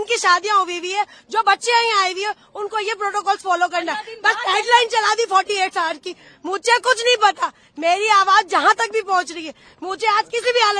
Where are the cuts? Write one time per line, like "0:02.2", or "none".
none